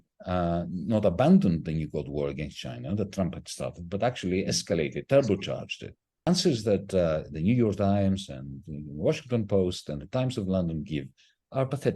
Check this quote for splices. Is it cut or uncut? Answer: cut